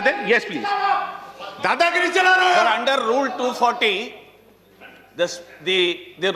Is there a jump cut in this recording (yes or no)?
no